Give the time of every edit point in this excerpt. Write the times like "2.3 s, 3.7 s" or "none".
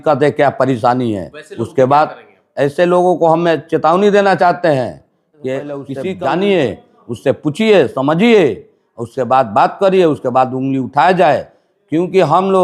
5.9 s